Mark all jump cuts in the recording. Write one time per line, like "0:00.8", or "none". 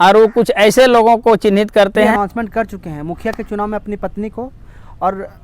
0:02.1